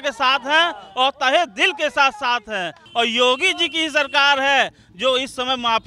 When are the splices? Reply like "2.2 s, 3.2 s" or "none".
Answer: 2.8 s

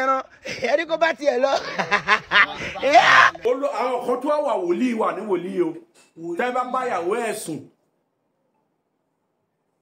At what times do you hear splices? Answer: 3.4 s

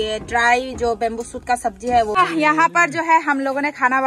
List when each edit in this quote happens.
2.2 s

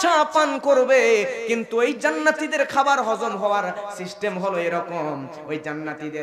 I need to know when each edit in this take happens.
none

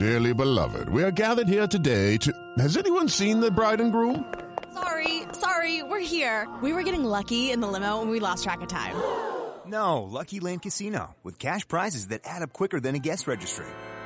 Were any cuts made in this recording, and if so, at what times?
none

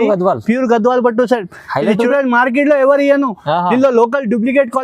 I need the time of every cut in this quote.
2.1 s

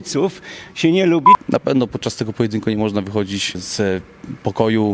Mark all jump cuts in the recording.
1.4 s, 3.6 s

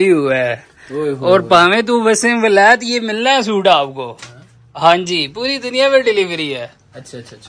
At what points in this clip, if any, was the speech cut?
none

